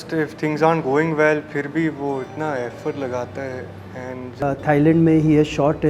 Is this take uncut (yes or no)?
no